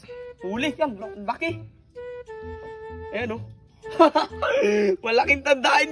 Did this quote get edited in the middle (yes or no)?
no